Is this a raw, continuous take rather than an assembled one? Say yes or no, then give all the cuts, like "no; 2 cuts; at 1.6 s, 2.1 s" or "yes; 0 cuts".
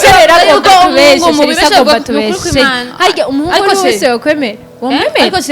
yes; 0 cuts